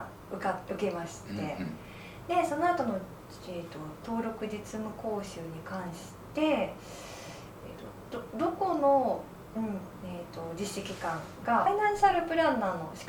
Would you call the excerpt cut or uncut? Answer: cut